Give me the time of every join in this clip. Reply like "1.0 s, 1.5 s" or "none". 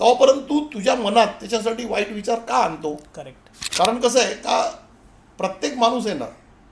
none